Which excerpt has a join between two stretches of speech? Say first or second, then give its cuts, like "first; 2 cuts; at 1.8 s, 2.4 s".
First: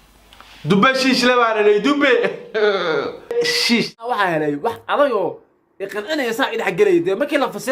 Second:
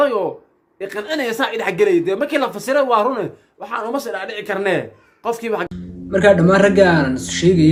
first; 1 cut; at 3.9 s